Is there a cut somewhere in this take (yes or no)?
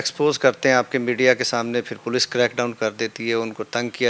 no